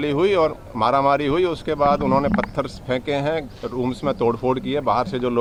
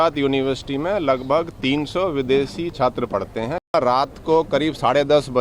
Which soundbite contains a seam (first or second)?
second